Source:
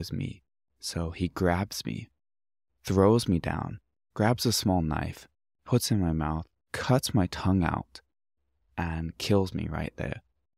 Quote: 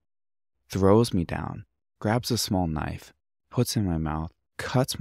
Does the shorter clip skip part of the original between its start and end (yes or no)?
no